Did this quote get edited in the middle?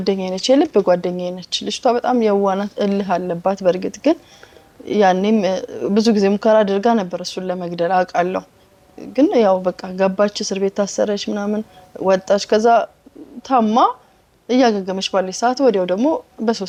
no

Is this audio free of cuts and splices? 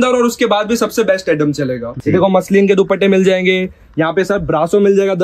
no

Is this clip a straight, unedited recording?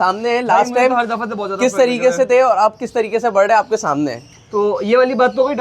yes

